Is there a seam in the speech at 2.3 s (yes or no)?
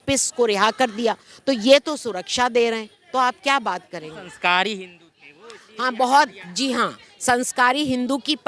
no